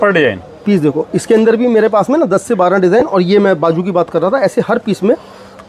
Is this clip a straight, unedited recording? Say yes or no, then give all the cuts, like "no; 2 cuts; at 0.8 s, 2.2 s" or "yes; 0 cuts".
yes; 0 cuts